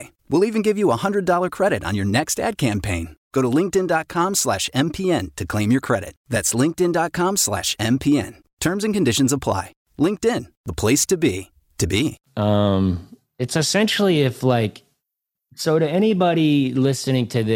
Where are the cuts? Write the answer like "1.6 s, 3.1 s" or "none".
none